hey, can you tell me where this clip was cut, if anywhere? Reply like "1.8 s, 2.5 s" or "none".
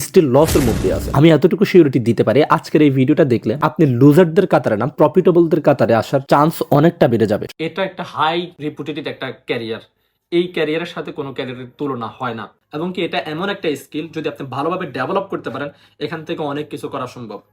7.4 s, 8.5 s, 12.4 s